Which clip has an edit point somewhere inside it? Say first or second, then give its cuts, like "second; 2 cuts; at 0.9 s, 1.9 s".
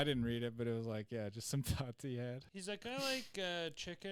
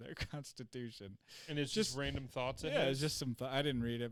first; 1 cut; at 2.5 s